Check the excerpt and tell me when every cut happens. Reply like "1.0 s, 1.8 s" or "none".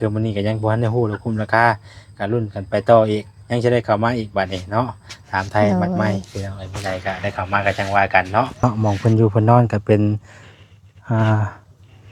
8.6 s